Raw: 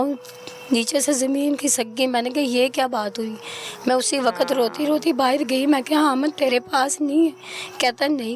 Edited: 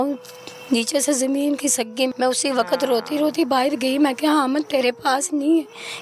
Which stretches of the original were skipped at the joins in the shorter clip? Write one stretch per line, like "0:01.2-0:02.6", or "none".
0:02.1-0:03.8